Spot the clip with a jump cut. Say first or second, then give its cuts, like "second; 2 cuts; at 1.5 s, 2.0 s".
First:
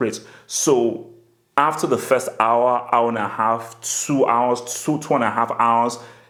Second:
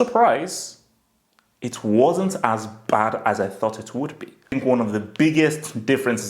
second; 1 cut; at 4.5 s